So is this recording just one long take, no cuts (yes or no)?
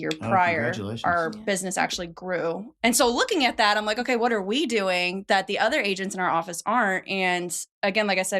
no